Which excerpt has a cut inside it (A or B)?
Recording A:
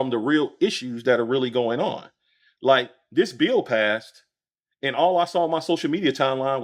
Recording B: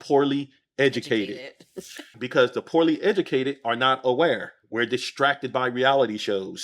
B